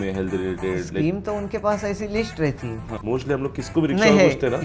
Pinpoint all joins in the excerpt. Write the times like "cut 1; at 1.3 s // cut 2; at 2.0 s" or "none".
cut 1; at 2.9 s